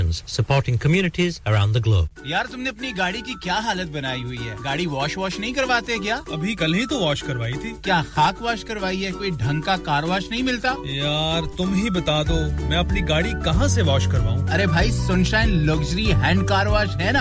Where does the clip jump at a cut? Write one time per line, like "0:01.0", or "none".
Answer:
0:02.1